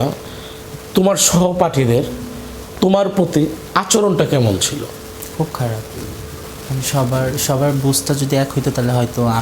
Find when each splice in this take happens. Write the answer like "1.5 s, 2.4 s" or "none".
6.4 s